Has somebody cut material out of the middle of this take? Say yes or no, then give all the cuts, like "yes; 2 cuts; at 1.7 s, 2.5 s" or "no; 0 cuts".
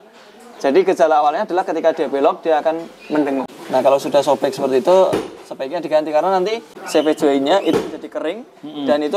yes; 2 cuts; at 3.5 s, 6.7 s